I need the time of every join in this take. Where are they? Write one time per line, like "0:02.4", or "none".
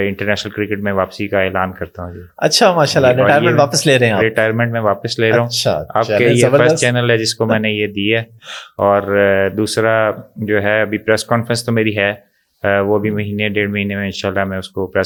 none